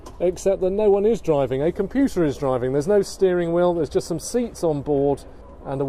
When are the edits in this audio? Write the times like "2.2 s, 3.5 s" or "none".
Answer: none